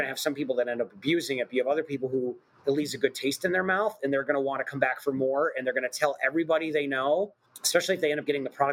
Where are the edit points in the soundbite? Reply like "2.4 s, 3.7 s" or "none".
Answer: none